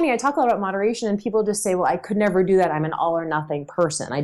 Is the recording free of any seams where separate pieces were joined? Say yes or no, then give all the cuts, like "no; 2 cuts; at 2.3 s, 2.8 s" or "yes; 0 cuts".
yes; 0 cuts